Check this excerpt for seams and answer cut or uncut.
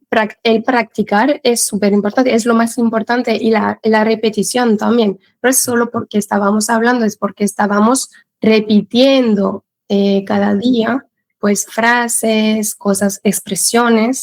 uncut